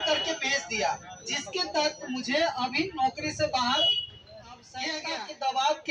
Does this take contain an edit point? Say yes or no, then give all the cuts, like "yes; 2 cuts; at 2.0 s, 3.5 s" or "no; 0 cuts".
yes; 1 cut; at 5.0 s